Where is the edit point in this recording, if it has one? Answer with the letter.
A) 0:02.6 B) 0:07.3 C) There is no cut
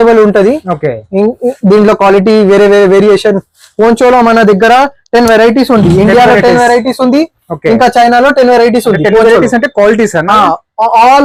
C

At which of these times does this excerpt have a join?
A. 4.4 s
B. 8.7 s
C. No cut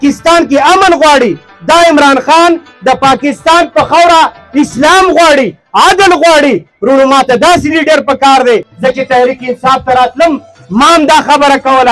B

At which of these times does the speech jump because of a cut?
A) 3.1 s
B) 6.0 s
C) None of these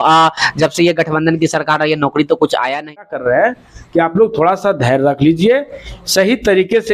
A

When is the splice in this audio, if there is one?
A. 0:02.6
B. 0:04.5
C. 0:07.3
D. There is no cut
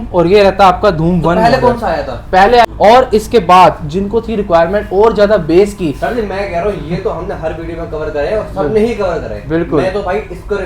A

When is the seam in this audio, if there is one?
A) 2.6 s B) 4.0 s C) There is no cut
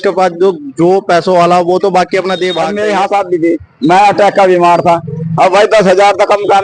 A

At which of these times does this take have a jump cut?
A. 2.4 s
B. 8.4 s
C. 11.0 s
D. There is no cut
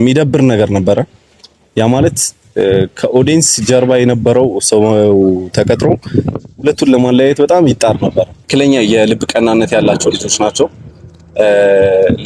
B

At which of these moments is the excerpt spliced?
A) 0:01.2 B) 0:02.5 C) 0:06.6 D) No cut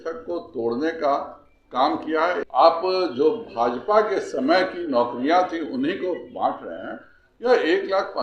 B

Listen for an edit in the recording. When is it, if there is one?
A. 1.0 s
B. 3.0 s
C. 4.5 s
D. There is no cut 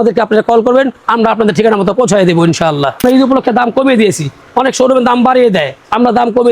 B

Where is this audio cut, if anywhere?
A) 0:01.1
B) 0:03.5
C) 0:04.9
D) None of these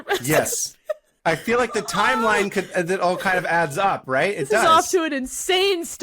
A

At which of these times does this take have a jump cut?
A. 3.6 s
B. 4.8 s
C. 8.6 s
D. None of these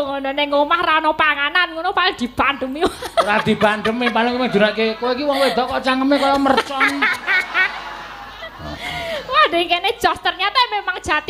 D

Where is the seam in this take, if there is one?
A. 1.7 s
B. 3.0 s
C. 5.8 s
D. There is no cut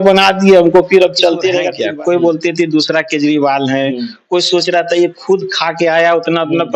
A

